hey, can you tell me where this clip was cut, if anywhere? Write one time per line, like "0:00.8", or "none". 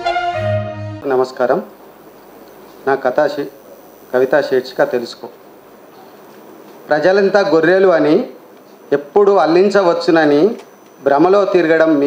0:01.0